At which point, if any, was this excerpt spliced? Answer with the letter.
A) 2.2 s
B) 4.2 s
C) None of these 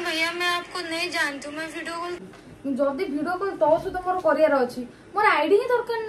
A